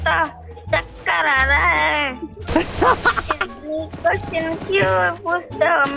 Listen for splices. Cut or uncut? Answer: uncut